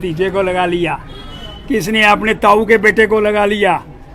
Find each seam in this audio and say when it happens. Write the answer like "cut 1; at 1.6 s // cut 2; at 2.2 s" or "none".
none